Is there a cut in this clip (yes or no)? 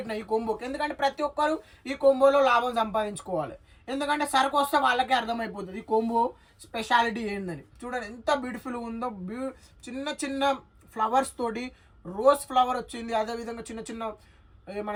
no